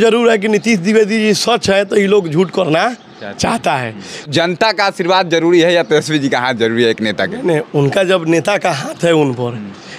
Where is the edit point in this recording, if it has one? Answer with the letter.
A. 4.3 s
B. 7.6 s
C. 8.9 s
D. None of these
A